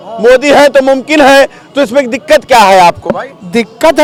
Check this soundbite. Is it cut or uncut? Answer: uncut